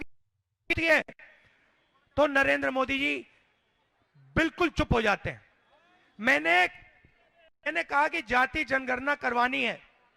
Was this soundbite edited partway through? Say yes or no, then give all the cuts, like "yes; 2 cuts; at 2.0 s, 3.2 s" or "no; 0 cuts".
no; 0 cuts